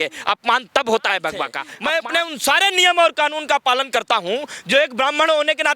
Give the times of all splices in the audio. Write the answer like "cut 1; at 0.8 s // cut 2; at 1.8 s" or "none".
cut 1; at 1.6 s